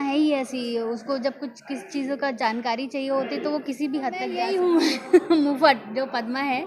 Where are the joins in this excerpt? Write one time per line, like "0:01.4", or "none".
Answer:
0:04.4